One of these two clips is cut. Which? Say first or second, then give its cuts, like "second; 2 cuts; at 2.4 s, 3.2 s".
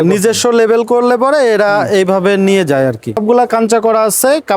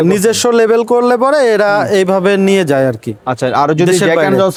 first; 1 cut; at 3.2 s